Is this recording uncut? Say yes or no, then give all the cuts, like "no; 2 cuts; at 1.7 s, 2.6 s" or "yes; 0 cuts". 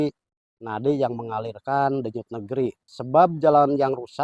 no; 1 cut; at 2.9 s